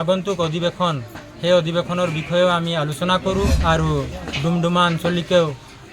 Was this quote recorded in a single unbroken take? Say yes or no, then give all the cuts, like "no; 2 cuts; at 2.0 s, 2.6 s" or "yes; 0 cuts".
no; 1 cut; at 3.6 s